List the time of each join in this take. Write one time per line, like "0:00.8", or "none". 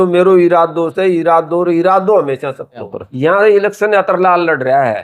0:03.0